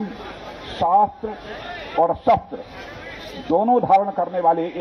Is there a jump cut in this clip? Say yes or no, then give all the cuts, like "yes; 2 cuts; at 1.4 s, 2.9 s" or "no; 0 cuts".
no; 0 cuts